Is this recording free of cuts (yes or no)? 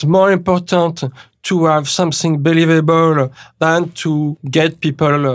no